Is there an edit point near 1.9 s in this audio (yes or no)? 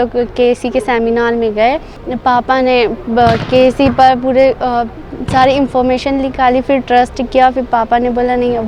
yes